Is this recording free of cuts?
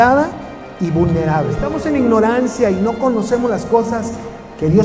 no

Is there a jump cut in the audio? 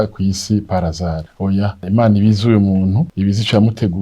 yes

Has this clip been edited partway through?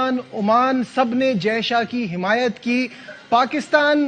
no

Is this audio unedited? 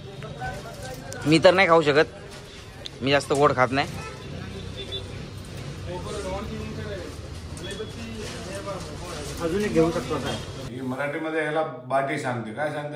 no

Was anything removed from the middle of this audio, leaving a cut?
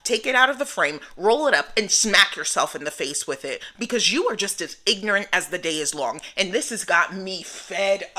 no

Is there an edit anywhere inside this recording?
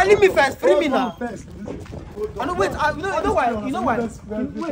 no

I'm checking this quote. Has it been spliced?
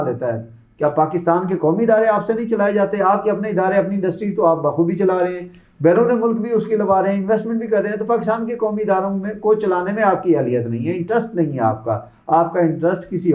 no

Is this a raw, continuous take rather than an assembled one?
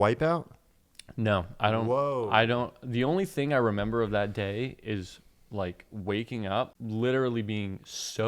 no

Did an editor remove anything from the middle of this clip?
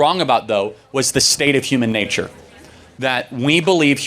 no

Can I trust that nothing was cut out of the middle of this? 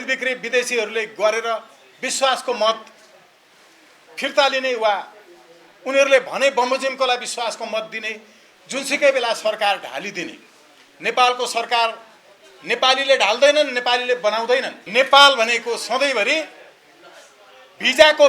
no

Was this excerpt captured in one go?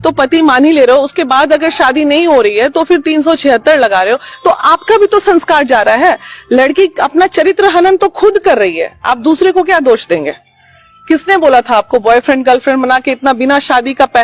yes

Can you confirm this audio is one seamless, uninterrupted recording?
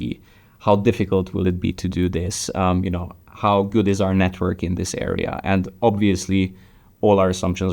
yes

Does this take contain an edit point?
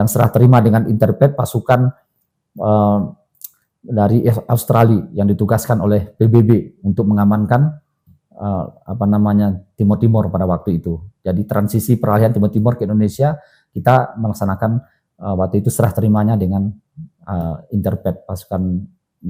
no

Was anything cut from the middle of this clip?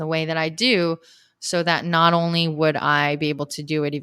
no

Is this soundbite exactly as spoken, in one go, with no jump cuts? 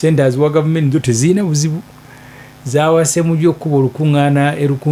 yes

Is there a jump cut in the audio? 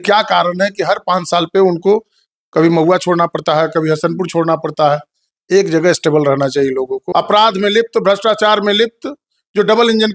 yes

